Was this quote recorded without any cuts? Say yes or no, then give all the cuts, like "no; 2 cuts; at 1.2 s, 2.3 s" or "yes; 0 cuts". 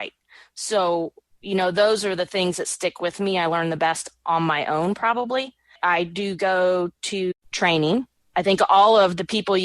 no; 3 cuts; at 5.8 s, 7.3 s, 8.2 s